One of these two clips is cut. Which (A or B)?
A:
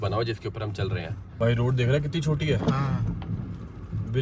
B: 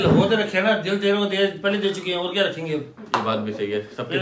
A